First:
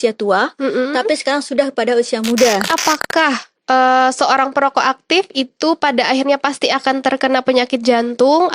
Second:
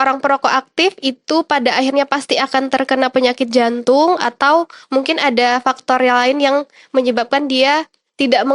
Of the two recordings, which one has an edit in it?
first; 1 cut; at 2.7 s

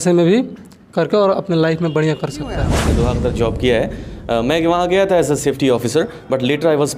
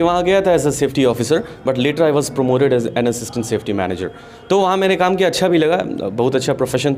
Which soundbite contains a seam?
first; 1 cut; at 2.8 s

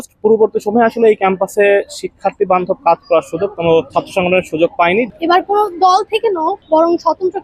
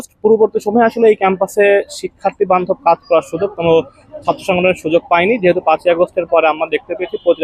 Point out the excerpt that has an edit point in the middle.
first; 3 cuts; at 3.9 s, 5.1 s, 6.6 s

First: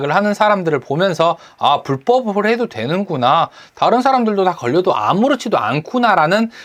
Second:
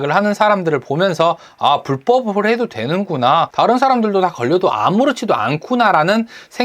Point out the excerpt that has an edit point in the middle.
second; 1 cut; at 3.5 s

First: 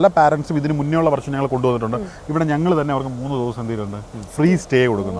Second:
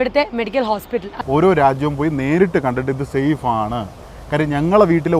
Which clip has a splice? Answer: second; 1 cut; at 1.1 s

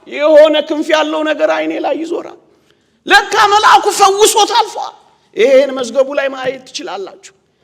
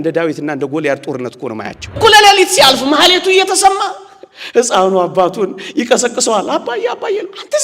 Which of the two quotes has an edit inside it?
second; 1 cut; at 2.0 s

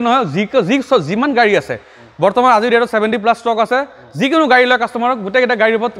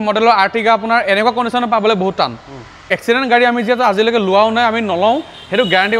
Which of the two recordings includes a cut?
second; 1 cut; at 2.9 s

